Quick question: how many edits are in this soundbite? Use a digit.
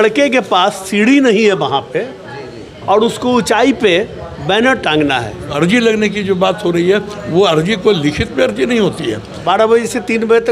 2